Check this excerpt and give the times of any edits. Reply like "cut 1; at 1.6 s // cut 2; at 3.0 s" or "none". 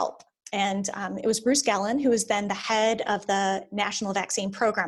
none

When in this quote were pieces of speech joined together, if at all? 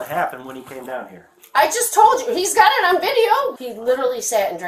cut 1; at 3.5 s

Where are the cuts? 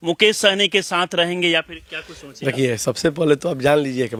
none

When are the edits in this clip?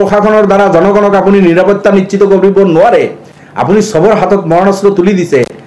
none

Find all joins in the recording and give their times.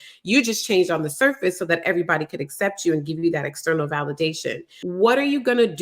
cut 1; at 4.7 s

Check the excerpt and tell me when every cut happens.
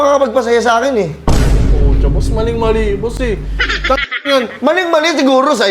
none

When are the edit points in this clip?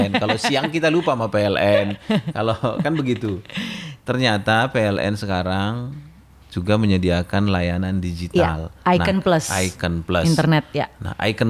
none

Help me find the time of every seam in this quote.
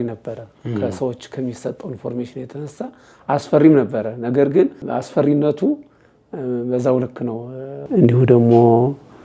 cut 1; at 7.9 s

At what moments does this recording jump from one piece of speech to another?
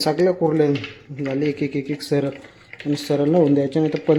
none

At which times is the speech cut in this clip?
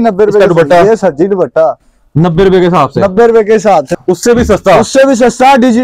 cut 1; at 3.9 s

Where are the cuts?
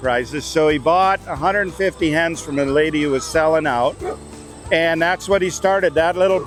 none

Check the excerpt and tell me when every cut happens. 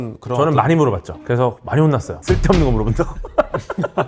none

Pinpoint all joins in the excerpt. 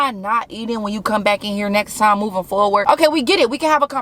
cut 1; at 2.8 s

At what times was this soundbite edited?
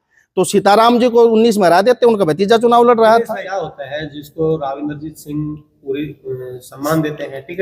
cut 1; at 3.4 s

